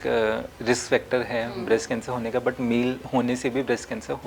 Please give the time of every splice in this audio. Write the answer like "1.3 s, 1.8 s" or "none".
3.0 s